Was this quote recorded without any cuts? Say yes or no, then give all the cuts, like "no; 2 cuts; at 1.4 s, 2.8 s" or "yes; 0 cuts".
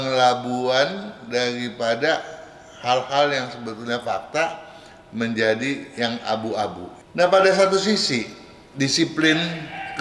no; 1 cut; at 6.9 s